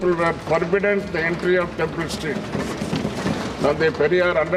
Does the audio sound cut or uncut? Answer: uncut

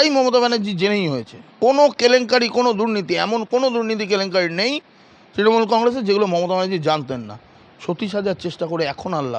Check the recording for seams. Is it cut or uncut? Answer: uncut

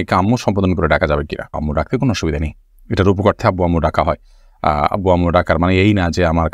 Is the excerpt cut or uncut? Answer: uncut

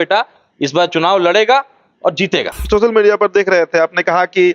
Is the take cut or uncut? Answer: cut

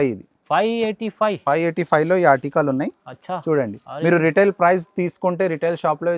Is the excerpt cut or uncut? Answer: uncut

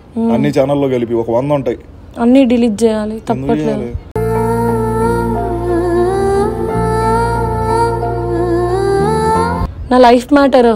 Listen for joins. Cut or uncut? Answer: uncut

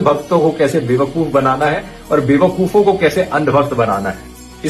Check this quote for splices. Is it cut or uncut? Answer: uncut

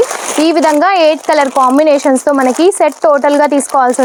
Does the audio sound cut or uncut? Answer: uncut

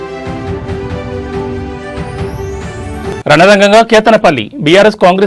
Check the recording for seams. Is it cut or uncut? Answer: cut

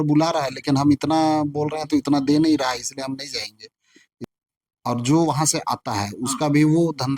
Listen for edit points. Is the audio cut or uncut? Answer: cut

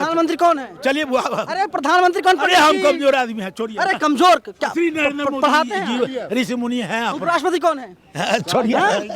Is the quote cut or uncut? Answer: uncut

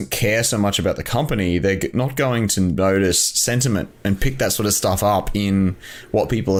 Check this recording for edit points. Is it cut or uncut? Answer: uncut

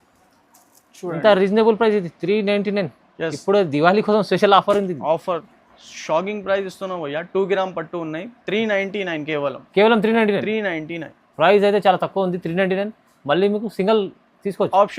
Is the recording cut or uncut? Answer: cut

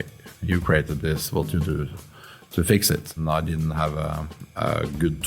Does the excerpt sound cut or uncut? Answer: cut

